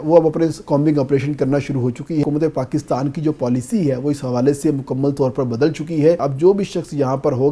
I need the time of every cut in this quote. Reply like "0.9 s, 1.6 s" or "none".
2.2 s, 6.3 s